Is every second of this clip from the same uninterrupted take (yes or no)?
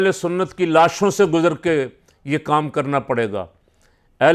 yes